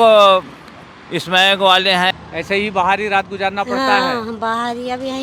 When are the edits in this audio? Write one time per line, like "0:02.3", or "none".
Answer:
0:02.1